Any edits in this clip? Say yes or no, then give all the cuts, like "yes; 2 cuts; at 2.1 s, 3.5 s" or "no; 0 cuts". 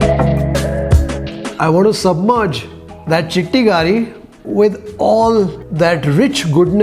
yes; 1 cut; at 1.6 s